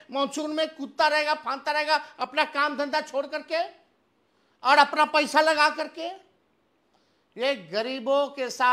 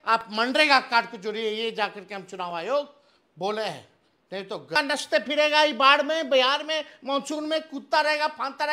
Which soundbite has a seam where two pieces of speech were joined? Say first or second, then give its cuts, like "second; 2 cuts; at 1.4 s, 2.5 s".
second; 1 cut; at 4.8 s